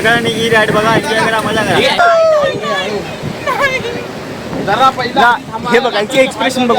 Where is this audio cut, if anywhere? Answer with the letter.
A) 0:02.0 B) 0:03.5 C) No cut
A